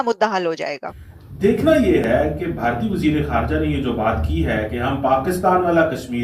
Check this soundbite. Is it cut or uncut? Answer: cut